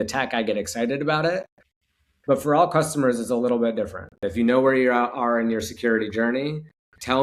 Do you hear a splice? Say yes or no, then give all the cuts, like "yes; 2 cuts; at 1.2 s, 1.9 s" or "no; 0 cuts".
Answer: yes; 1 cut; at 4.3 s